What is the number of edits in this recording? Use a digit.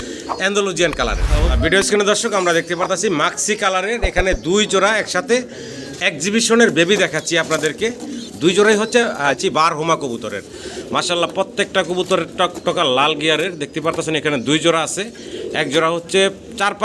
2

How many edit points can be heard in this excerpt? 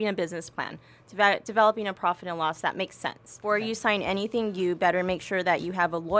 1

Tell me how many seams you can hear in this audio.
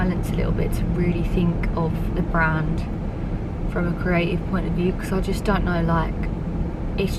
0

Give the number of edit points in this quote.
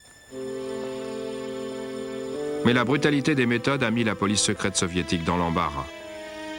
0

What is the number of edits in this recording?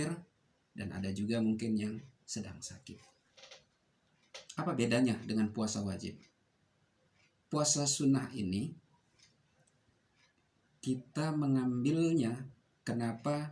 1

